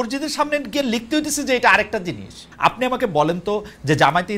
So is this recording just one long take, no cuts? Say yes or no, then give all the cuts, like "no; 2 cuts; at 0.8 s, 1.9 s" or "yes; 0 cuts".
no; 1 cut; at 2.5 s